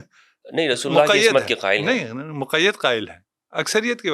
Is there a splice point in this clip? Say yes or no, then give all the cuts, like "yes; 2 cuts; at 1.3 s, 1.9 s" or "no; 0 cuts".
no; 0 cuts